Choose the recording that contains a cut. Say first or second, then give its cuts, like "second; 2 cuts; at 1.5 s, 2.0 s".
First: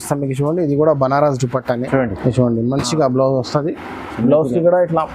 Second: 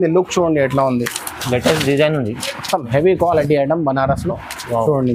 first; 1 cut; at 1.8 s